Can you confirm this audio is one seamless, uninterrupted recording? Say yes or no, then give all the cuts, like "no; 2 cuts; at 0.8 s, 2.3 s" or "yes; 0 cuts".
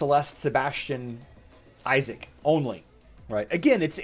no; 1 cut; at 3.0 s